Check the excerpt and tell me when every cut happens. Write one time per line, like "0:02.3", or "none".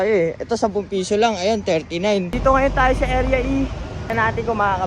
0:02.3
0:04.1

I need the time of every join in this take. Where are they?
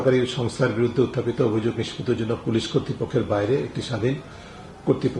none

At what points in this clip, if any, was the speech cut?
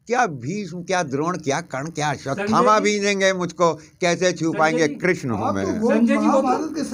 none

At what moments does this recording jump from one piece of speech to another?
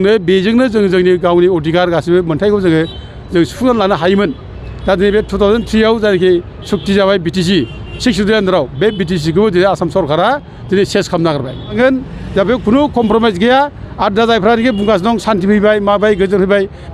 0:11.7

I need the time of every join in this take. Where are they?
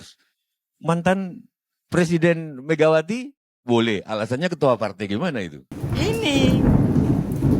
0:05.8

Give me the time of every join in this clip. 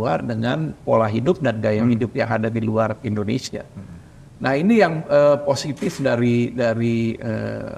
none

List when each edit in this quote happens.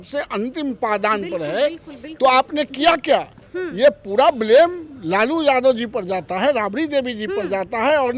none

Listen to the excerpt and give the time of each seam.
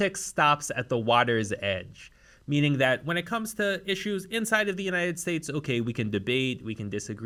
none

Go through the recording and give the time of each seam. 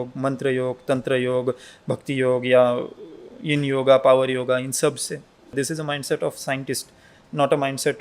0:05.5

